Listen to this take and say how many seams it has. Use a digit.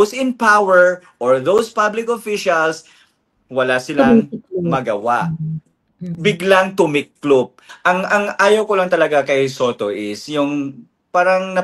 1